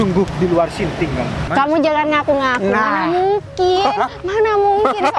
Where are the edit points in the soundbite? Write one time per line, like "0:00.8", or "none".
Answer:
0:01.5